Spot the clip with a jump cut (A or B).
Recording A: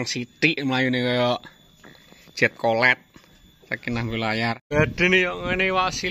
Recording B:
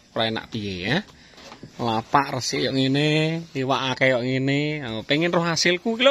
A